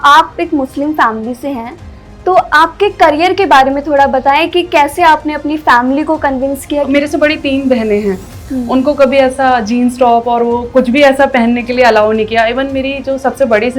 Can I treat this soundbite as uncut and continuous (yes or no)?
no